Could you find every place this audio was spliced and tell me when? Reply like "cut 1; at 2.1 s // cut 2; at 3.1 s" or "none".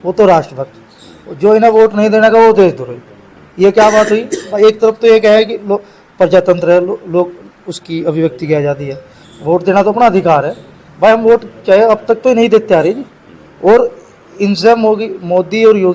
none